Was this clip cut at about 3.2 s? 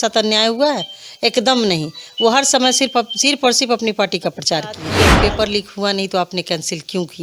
no; 1 cut; at 4.9 s

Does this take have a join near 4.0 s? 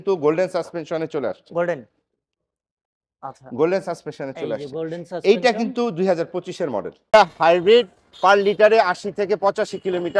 no; 1 cut; at 7.1 s

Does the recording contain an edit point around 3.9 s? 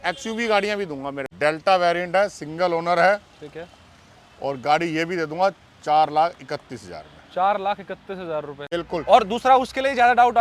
no; 2 cuts; at 1.2 s, 8.7 s

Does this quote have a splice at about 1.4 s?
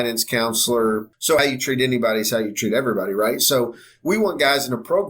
yes; 1 cut; at 1.4 s

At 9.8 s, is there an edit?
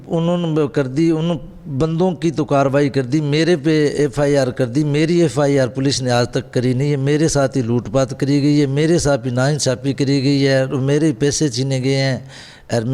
no; 0 cuts

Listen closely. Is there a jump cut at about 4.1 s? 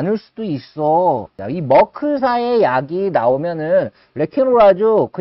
no; 1 cut; at 1.4 s

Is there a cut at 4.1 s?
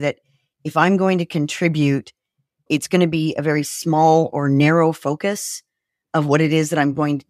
no; 1 cut; at 2.7 s

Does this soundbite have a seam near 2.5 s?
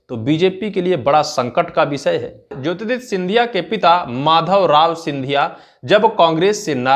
yes; 1 cut; at 2.5 s

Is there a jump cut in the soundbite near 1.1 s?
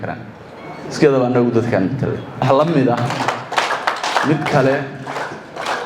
no; 1 cut; at 2.4 s

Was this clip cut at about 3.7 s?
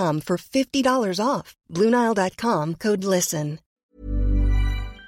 yes; 1 cut; at 3.7 s

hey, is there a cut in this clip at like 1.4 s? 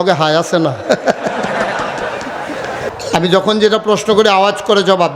no; 1 cut; at 2.9 s

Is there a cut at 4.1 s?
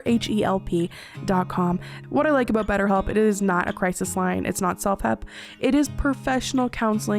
no; 1 cut; at 1.9 s

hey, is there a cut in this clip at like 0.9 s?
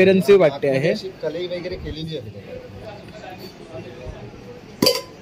no; 0 cuts

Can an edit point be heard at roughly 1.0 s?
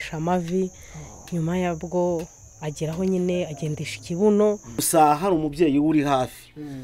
no; 1 cut; at 4.7 s

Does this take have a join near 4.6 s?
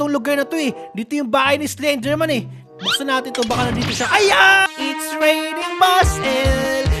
yes; 1 cut; at 4.6 s

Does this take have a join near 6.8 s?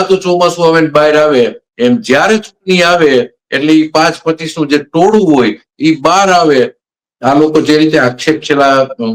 yes; 1 cut; at 6.8 s

